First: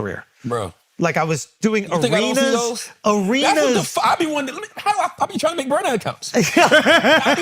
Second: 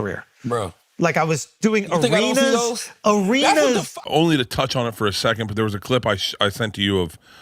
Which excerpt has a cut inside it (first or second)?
second